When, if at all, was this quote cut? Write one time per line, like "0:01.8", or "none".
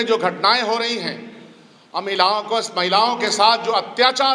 none